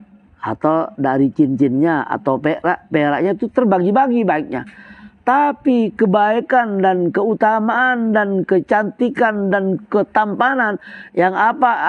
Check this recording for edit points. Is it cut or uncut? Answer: uncut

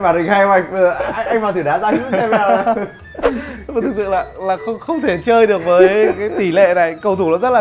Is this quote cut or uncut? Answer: cut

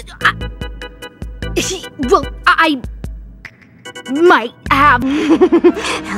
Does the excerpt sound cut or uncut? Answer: cut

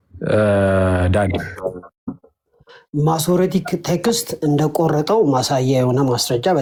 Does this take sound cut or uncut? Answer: uncut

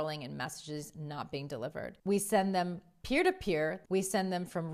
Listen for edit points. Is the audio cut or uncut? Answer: cut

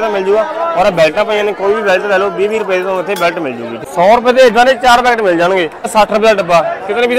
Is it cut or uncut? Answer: cut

